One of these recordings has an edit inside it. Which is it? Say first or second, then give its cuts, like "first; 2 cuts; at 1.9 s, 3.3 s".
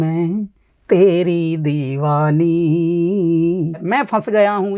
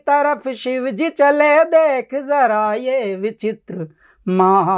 first; 1 cut; at 3.8 s